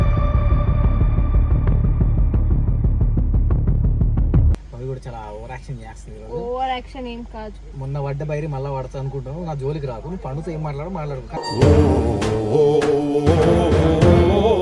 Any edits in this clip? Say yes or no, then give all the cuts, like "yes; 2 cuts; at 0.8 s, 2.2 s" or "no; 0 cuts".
yes; 1 cut; at 4.7 s